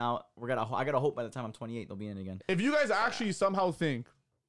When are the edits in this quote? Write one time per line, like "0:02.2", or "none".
0:02.3